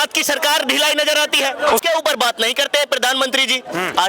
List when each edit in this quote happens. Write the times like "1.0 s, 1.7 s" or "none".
1.8 s

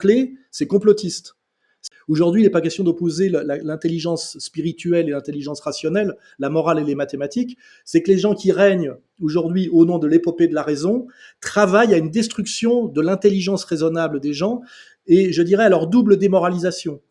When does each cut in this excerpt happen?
1.8 s

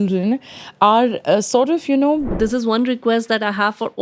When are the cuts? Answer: 2.3 s

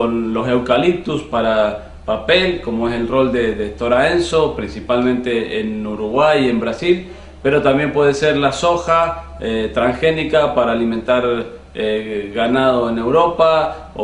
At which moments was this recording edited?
2.3 s

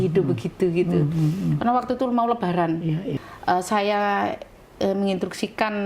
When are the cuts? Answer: 3.2 s

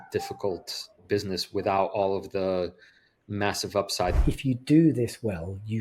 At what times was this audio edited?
1.0 s, 4.2 s

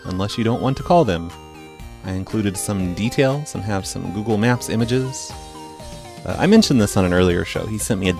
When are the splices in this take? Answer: 5.1 s

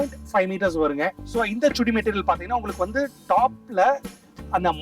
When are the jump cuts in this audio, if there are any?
1.2 s

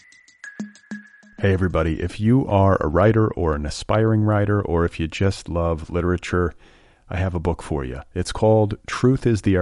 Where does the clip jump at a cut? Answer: 0.9 s

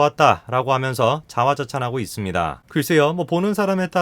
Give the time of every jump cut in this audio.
2.6 s

